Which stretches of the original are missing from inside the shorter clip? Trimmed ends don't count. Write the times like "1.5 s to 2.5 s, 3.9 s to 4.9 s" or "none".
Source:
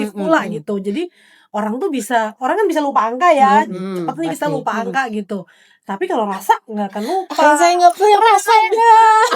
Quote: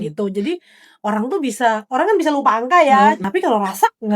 3.7 s to 5.9 s